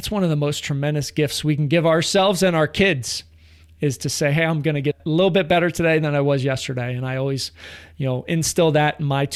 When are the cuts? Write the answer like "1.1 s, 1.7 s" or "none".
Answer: none